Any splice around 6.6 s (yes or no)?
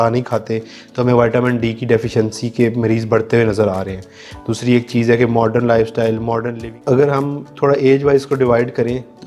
yes